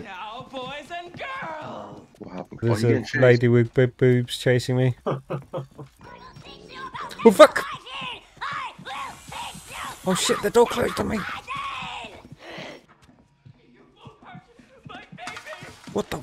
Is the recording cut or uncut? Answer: uncut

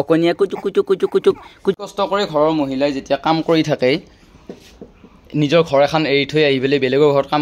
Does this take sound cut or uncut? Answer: cut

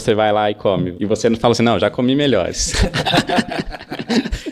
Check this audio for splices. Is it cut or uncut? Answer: cut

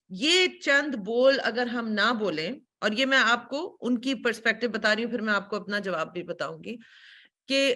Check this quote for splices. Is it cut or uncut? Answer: uncut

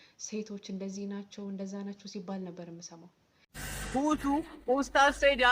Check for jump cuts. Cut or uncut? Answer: cut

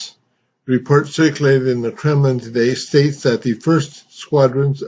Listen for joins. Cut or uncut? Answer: cut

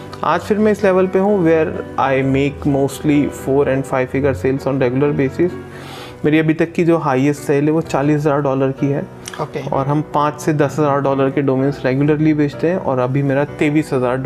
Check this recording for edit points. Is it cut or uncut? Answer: uncut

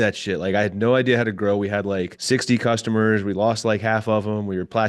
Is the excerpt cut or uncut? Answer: cut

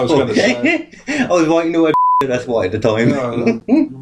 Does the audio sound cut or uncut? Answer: uncut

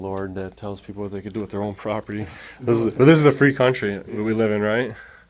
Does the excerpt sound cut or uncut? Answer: uncut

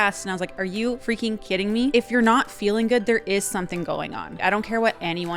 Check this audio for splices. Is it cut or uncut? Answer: cut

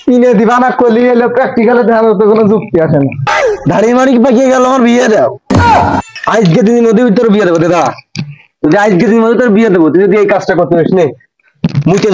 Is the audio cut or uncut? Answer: cut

